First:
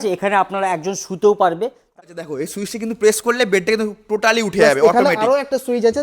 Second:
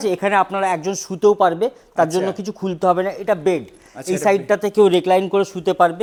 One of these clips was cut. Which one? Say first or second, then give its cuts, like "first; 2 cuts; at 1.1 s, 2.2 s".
first; 1 cut; at 2.0 s